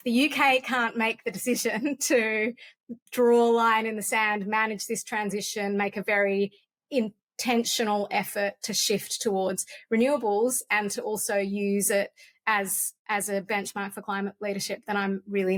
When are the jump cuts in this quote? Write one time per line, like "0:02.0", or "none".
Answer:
none

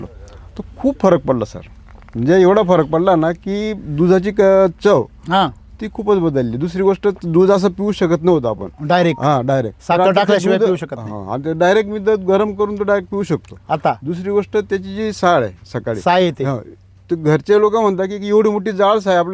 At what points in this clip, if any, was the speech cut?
none

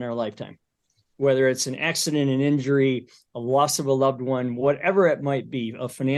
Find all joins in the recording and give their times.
none

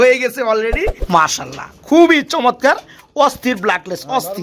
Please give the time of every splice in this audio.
0:00.9

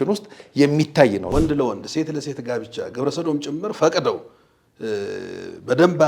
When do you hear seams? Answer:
0:01.3

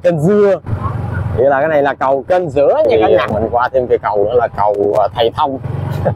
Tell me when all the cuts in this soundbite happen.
0:02.9

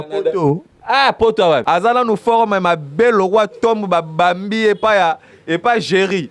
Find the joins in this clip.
0:01.6

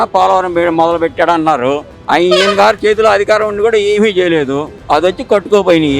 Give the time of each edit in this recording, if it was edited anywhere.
0:01.9
0:04.7

